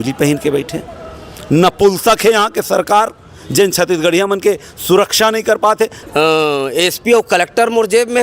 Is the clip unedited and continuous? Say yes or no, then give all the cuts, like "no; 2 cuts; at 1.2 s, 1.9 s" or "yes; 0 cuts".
no; 1 cut; at 6.0 s